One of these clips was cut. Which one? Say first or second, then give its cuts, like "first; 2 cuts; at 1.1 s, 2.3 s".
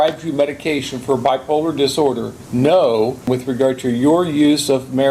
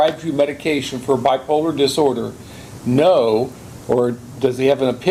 first; 2 cuts; at 2.3 s, 3.3 s